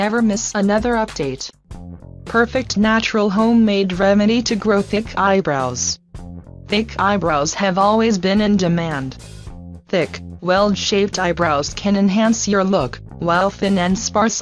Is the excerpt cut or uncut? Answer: uncut